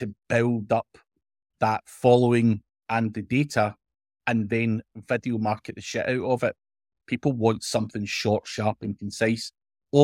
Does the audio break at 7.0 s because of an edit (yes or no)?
yes